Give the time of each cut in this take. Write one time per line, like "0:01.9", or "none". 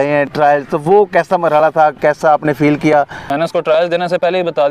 0:03.2